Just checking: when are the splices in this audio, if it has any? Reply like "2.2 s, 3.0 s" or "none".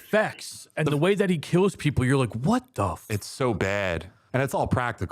4.1 s